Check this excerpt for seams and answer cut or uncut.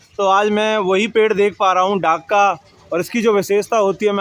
uncut